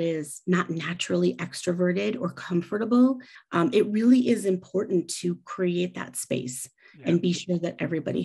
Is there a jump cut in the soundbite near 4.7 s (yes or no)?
no